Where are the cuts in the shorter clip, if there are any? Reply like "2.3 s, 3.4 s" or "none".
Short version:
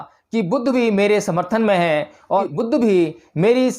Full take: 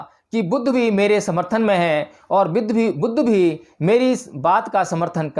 2.5 s